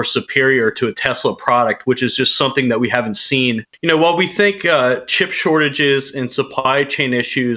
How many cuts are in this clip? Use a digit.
1